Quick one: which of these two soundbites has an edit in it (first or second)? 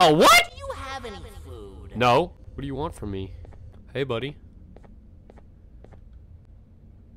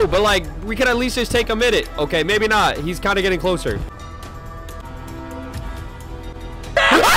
first